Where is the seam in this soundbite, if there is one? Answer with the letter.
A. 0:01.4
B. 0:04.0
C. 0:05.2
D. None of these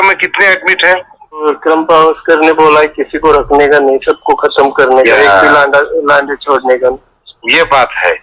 A